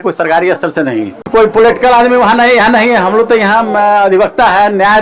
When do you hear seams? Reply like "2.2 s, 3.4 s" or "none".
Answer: 1.2 s